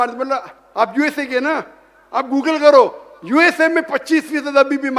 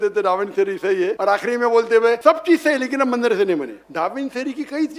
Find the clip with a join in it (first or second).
second